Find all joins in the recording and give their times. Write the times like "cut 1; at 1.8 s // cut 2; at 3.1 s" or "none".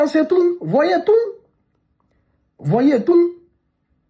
none